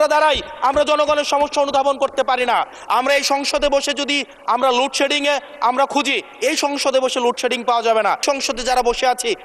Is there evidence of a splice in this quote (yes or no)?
yes